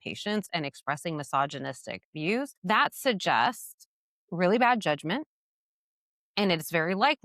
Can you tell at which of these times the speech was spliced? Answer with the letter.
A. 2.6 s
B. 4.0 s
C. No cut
A